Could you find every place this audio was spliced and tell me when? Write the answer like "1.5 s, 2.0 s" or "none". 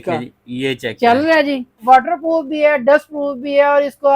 1.7 s